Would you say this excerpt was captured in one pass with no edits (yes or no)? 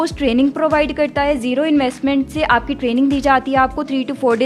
yes